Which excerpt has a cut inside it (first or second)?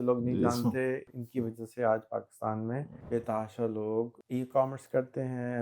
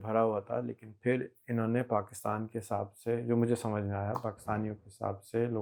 first